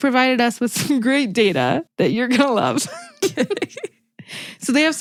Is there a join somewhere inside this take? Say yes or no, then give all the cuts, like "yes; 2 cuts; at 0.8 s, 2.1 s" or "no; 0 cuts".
no; 0 cuts